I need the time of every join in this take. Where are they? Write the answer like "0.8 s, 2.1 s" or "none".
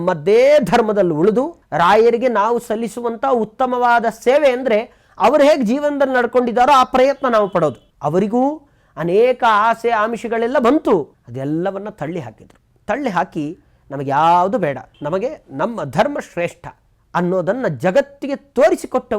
1.6 s, 7.9 s, 11.2 s, 14.9 s